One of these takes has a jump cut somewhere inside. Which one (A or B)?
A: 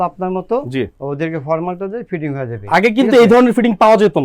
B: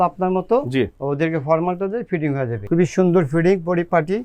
B